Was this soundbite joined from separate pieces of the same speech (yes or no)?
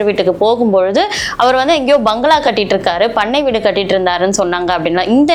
no